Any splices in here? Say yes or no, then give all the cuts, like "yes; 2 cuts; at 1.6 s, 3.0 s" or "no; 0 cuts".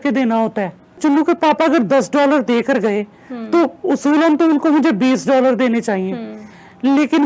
yes; 1 cut; at 1.0 s